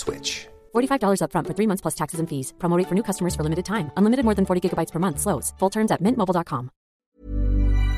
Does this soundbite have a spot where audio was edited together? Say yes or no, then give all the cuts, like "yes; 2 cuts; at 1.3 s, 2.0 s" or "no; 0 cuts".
yes; 1 cut; at 7.0 s